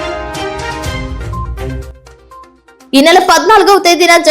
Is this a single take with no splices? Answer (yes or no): no